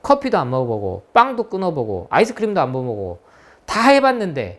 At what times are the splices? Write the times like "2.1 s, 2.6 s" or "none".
none